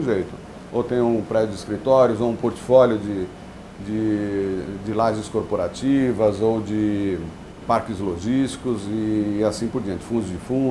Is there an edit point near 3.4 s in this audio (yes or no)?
no